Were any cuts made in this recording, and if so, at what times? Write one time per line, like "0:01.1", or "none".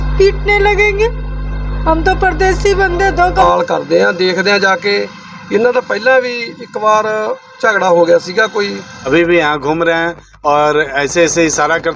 0:03.4
0:08.9